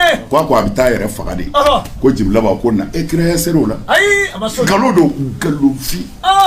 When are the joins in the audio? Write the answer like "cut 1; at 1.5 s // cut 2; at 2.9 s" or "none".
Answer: cut 1; at 4.7 s

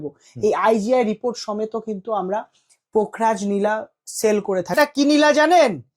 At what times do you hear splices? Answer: cut 1; at 4.8 s

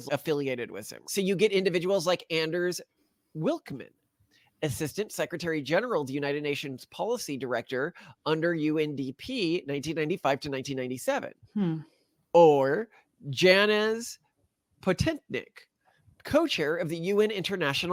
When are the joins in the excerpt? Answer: none

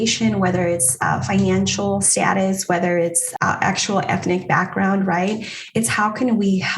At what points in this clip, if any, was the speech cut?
cut 1; at 2.1 s // cut 2; at 3.2 s

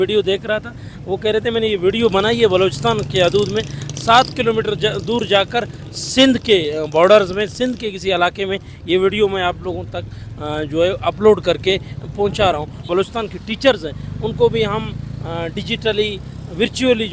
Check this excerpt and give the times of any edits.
cut 1; at 12.9 s

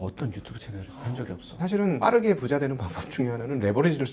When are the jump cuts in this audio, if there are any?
cut 1; at 1.4 s

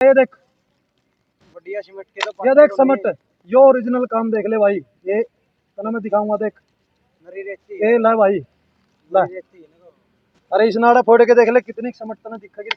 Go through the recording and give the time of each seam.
none

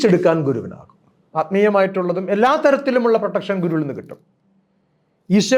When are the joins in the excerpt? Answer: cut 1; at 1.2 s

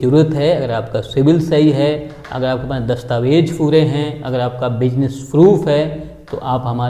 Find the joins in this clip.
none

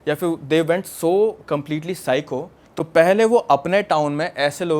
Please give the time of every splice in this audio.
cut 1; at 2.6 s

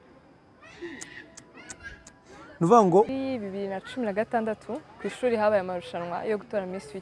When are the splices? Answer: cut 1; at 3.1 s

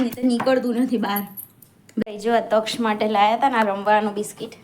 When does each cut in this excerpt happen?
cut 1; at 2.0 s

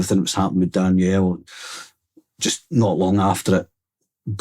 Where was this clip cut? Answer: cut 1; at 2.1 s

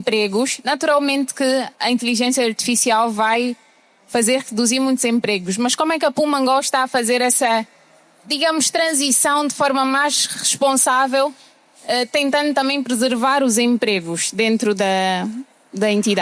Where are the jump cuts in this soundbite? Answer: none

